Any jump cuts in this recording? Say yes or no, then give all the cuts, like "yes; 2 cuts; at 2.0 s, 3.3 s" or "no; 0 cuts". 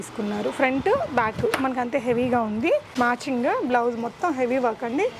yes; 1 cut; at 2.9 s